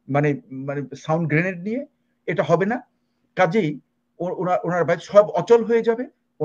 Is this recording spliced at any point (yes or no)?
no